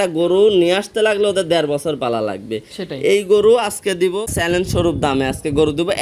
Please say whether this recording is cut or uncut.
cut